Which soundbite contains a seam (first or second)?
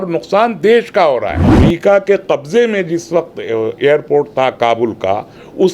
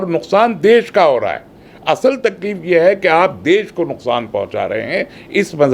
first